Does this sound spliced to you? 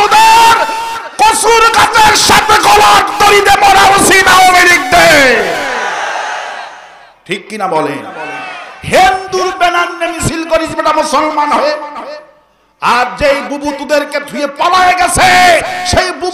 no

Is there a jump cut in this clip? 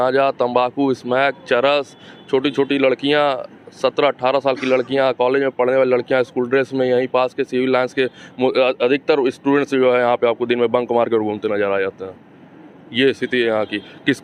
no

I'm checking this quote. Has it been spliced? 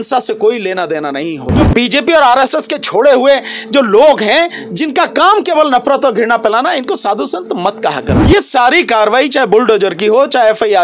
yes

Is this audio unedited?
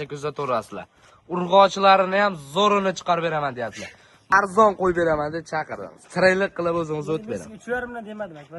no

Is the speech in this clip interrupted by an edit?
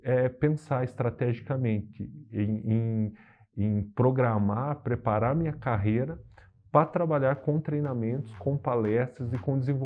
no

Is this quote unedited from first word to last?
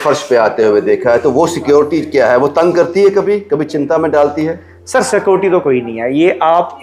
yes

